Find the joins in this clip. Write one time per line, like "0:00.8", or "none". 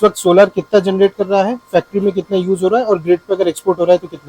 none